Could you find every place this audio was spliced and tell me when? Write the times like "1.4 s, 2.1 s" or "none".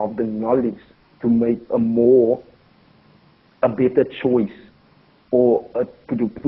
none